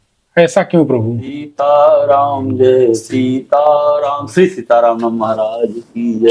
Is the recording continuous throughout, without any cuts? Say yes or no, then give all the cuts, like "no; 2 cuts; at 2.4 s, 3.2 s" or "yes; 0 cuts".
no; 1 cut; at 1.5 s